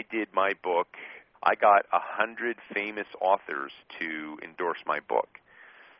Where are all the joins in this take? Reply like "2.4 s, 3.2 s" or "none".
1.2 s